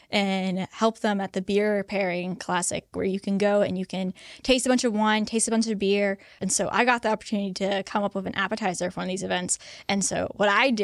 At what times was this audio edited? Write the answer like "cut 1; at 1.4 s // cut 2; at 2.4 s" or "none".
cut 1; at 2.9 s // cut 2; at 6.4 s